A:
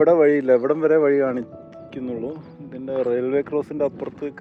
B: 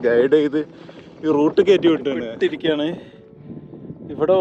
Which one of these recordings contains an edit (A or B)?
B